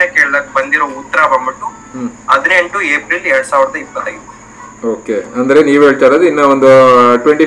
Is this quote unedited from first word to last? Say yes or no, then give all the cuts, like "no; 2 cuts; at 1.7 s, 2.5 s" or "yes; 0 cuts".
yes; 0 cuts